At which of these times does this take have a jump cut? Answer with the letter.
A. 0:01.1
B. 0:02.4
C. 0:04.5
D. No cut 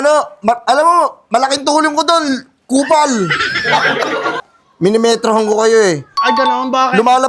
C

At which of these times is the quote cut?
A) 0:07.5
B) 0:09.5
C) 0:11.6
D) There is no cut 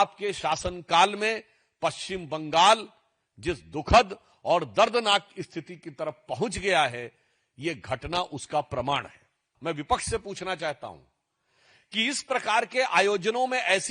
B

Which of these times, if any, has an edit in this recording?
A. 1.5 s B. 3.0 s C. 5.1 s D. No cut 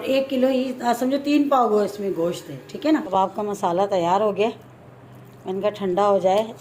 B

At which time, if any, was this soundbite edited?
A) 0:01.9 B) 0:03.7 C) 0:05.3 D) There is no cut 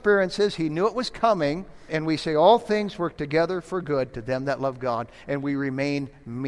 A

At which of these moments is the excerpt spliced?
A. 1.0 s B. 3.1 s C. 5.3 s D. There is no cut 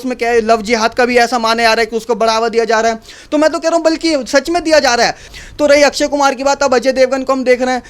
C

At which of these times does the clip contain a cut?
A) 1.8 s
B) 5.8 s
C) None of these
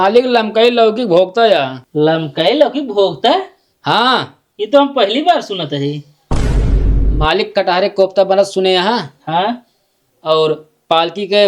A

